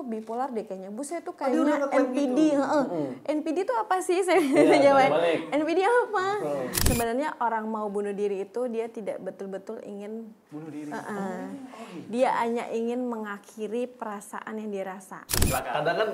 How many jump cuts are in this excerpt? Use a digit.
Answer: 2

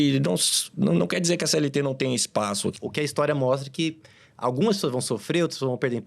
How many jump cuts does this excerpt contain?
1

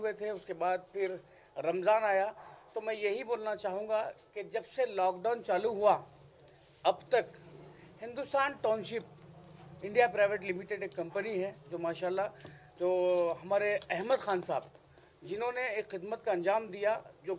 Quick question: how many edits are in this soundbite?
0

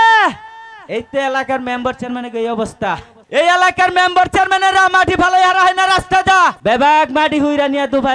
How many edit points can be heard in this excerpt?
2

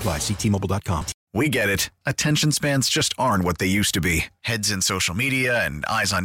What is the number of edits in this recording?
1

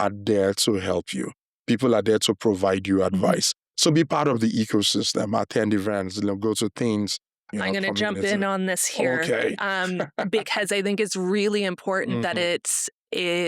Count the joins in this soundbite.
1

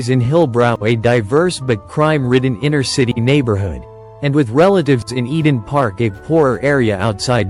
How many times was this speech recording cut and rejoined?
0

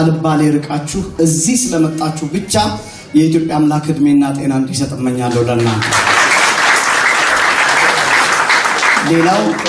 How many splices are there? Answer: 1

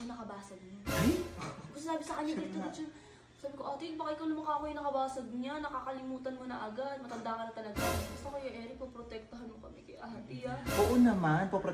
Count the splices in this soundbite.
1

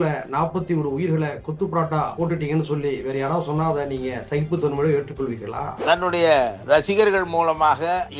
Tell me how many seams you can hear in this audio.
2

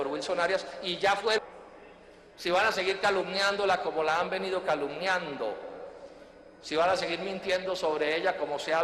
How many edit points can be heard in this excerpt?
0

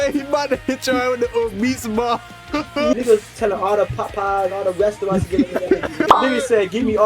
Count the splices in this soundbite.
2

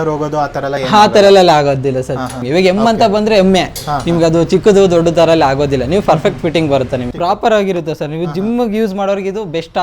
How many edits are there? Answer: 2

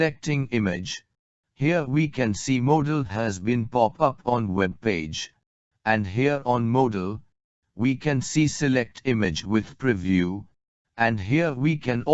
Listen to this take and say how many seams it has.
1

